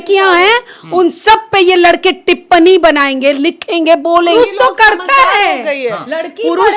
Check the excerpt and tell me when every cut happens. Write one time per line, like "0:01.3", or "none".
0:04.3